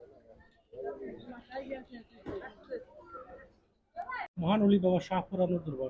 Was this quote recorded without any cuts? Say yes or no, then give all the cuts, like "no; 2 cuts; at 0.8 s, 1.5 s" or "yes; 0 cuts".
no; 1 cut; at 4.3 s